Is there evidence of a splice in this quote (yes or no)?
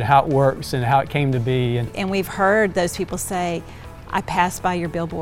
yes